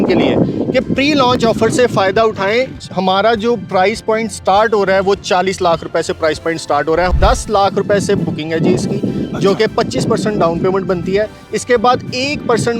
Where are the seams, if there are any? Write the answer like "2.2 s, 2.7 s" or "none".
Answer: 2.8 s, 7.1 s